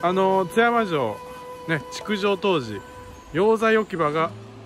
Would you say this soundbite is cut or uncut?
uncut